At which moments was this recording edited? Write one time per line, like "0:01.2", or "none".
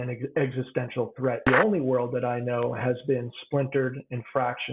0:01.4